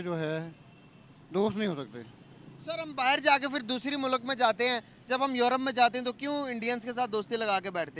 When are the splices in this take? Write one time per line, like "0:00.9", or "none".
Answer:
none